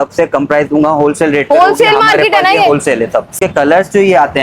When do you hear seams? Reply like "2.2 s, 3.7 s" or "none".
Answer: 3.3 s